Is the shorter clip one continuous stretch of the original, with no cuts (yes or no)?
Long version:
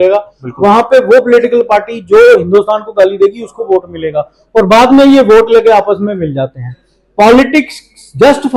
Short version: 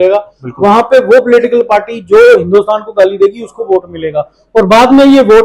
yes